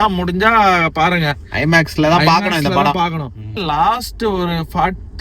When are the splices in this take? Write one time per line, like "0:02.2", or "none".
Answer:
0:03.6